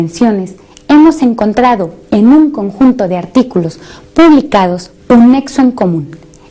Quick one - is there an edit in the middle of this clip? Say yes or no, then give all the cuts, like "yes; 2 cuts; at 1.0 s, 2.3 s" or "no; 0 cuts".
no; 0 cuts